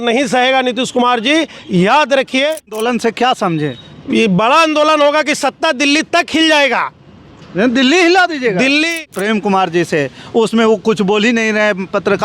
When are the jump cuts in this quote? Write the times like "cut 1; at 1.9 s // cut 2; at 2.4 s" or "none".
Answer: cut 1; at 2.8 s // cut 2; at 9.0 s